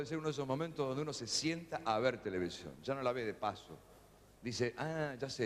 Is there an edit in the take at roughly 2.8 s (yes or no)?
no